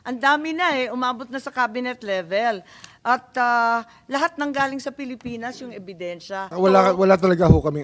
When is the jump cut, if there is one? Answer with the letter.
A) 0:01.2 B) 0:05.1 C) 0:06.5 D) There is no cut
C